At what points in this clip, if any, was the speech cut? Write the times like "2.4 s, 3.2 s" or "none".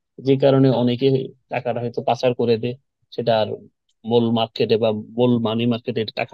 none